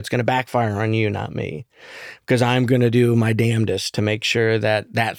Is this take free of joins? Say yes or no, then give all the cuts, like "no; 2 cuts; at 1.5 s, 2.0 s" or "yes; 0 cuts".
yes; 0 cuts